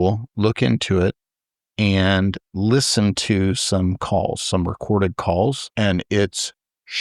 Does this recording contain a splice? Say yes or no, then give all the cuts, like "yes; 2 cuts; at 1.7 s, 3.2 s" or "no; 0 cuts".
yes; 1 cut; at 5.6 s